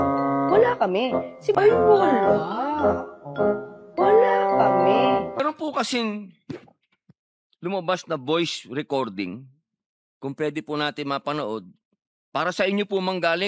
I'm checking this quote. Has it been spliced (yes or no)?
yes